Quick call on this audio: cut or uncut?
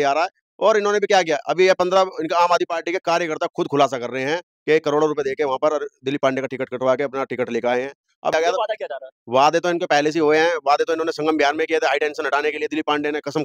cut